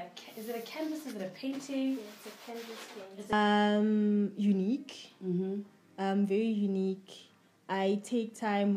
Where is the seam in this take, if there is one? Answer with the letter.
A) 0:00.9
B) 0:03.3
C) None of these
B